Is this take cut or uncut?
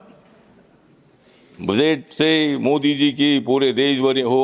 uncut